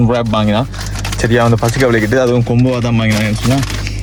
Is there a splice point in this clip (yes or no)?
no